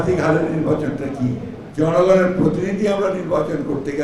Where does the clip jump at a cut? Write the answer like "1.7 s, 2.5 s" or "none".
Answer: 1.6 s